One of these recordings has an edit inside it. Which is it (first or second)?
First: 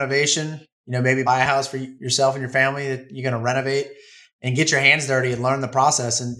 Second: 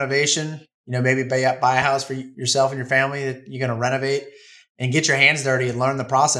first